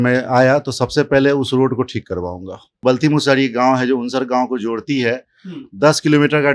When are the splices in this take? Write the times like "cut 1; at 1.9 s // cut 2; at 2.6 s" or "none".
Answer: cut 1; at 2.8 s